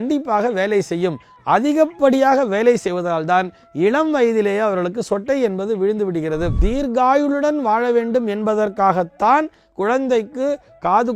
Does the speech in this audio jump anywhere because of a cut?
yes; 1 cut; at 6.6 s

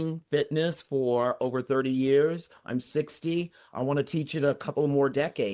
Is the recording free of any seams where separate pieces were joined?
yes; 0 cuts

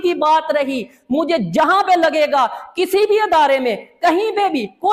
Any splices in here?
no; 0 cuts

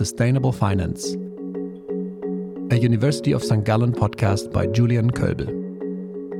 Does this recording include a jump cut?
no; 0 cuts

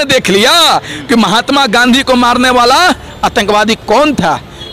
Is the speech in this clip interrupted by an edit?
no; 0 cuts

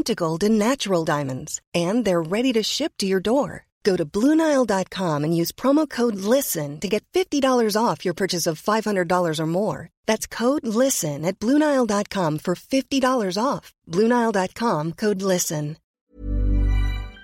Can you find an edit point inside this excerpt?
yes; 1 cut; at 15.8 s

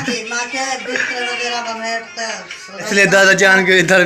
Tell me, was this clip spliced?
yes; 1 cut; at 2.9 s

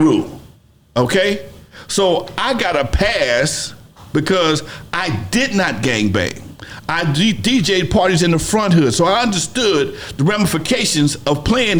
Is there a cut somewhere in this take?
no; 0 cuts

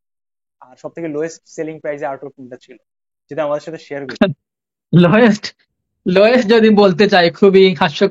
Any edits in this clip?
no; 0 cuts

